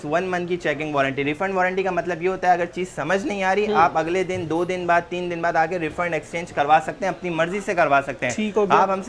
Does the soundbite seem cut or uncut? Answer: uncut